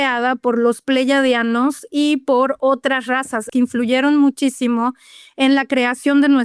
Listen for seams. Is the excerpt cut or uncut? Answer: cut